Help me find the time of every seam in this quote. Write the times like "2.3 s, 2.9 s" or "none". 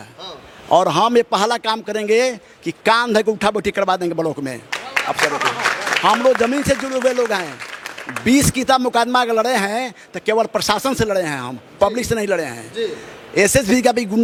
none